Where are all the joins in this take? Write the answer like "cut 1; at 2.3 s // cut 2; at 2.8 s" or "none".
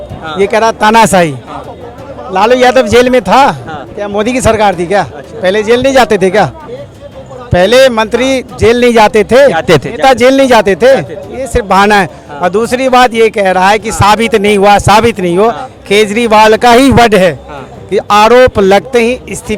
none